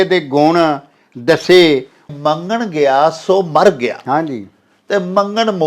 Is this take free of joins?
no; 1 cut; at 2.1 s

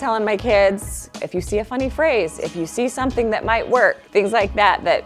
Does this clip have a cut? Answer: yes; 2 cuts; at 1.1 s, 4.0 s

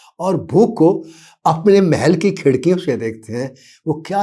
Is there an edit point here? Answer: no; 0 cuts

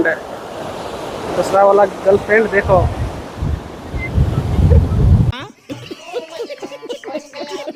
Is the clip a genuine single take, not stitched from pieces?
yes; 0 cuts

